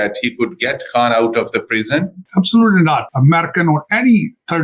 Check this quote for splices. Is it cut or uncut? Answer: cut